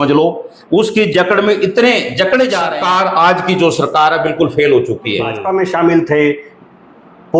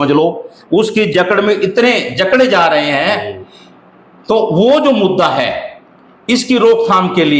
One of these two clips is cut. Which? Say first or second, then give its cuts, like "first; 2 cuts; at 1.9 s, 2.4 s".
first; 2 cuts; at 2.7 s, 5.4 s